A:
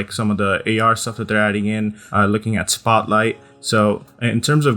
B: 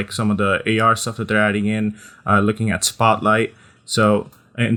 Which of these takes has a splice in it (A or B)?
A